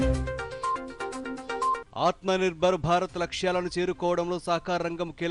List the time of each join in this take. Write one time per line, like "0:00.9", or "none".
0:01.8